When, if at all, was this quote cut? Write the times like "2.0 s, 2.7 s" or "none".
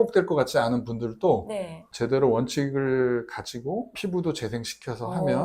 3.9 s